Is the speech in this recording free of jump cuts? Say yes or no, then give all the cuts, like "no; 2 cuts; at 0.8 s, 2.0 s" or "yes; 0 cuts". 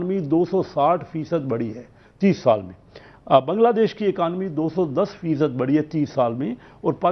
yes; 0 cuts